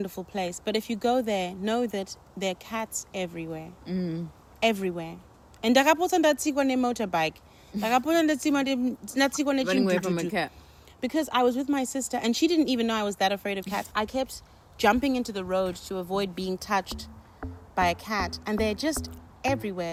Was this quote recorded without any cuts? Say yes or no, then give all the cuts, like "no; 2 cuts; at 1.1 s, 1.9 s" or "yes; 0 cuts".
yes; 0 cuts